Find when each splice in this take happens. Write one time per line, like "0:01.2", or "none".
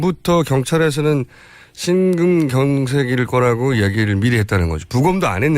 0:01.8